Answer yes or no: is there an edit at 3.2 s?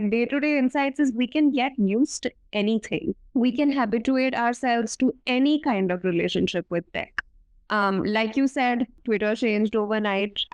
yes